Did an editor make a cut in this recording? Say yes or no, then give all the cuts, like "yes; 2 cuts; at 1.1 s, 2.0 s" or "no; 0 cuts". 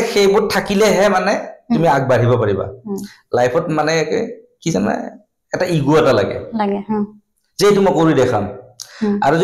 no; 0 cuts